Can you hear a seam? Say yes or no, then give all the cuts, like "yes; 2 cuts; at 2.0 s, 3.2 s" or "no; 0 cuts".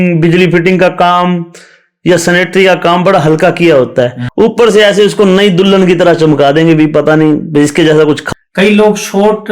yes; 2 cuts; at 4.2 s, 8.2 s